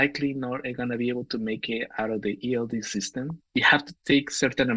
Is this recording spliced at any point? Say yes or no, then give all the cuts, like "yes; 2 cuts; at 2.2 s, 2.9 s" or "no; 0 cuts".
yes; 1 cut; at 3.4 s